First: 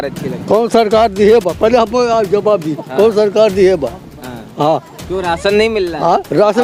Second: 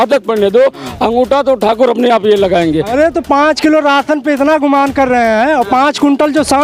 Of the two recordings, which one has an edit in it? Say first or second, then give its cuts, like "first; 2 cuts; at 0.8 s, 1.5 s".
second; 1 cut; at 2.9 s